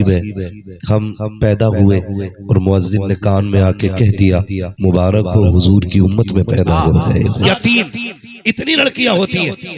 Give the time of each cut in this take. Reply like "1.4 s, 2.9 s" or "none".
7.4 s